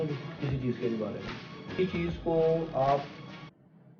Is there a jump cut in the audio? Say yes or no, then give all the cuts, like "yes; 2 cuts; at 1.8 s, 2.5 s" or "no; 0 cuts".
yes; 1 cut; at 1.7 s